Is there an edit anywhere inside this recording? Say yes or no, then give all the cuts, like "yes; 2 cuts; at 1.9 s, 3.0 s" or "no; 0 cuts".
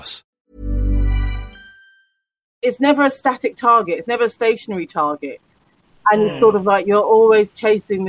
yes; 1 cut; at 2.4 s